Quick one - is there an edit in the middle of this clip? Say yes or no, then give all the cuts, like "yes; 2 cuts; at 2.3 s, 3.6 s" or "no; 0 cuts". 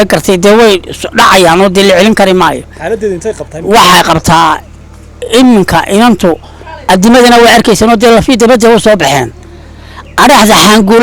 no; 0 cuts